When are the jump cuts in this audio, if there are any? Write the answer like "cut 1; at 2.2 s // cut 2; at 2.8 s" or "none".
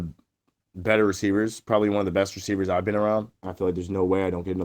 cut 1; at 3.4 s